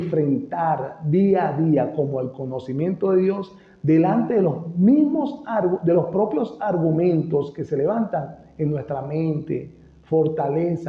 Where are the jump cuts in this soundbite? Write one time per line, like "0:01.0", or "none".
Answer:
none